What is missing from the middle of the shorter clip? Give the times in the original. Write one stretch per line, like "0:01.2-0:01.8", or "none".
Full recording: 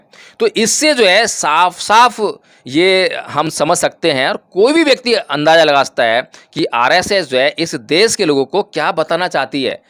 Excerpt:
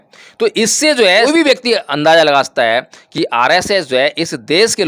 0:01.2-0:04.6